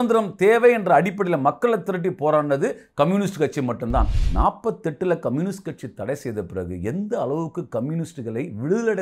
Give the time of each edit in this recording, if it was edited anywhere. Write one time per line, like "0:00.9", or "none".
0:04.2